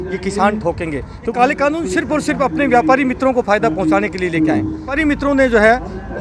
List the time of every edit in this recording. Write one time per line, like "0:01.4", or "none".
0:01.2
0:05.0